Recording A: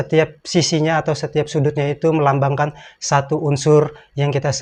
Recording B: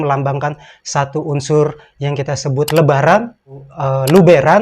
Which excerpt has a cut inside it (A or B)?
B